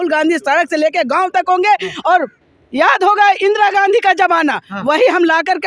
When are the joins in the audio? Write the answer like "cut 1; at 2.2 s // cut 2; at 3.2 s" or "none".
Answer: none